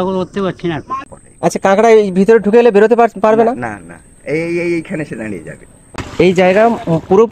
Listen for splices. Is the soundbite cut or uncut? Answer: cut